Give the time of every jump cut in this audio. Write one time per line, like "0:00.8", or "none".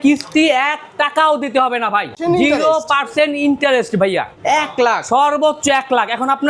0:02.1
0:04.3